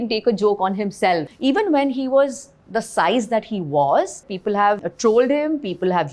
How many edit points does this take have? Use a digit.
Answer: 2